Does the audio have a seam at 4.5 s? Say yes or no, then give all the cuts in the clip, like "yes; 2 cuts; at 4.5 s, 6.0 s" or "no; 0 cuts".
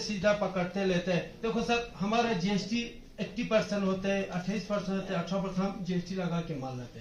no; 0 cuts